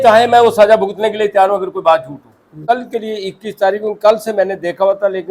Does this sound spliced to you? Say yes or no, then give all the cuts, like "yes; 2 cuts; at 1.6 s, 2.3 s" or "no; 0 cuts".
yes; 1 cut; at 2.6 s